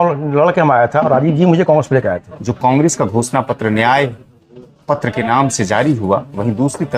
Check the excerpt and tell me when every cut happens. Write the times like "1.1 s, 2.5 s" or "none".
2.3 s